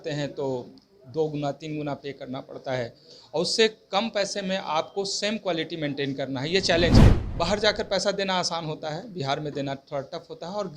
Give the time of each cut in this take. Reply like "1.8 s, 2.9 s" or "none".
7.0 s